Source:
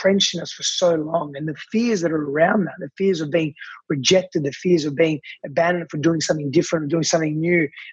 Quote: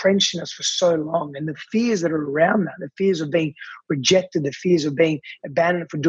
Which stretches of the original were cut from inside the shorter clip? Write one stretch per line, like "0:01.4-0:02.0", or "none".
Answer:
none

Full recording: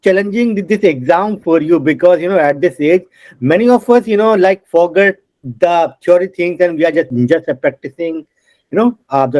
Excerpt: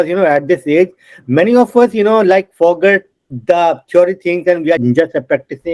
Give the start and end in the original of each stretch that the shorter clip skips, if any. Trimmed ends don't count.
0:06.9-0:07.1

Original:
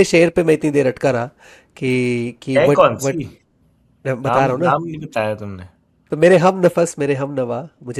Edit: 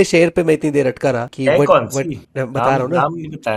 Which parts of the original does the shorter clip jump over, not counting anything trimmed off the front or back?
0:01.3-0:02.4
0:03.3-0:03.9

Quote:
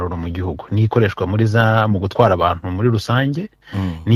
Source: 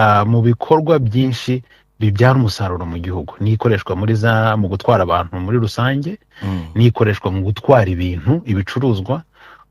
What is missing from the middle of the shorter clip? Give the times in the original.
none

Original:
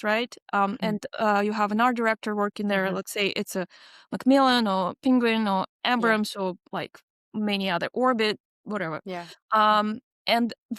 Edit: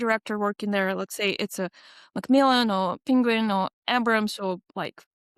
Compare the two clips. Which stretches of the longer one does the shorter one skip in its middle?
none

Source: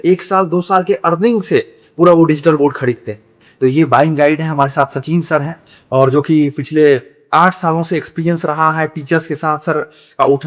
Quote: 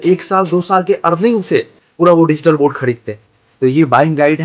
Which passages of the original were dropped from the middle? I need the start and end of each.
none

